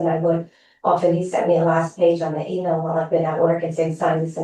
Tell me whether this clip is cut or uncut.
uncut